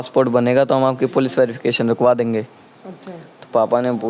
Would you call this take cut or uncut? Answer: uncut